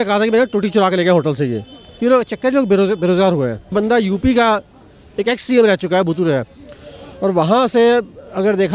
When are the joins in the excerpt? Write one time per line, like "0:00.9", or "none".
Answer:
0:03.7